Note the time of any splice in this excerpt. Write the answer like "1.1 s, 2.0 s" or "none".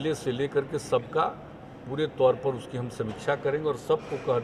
none